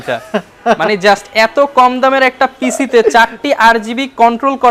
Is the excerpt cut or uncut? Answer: uncut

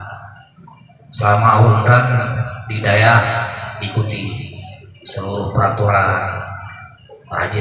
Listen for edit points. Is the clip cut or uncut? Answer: uncut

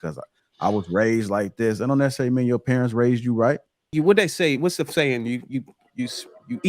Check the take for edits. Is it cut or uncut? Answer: cut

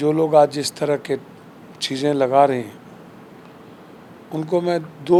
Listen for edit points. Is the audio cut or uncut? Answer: uncut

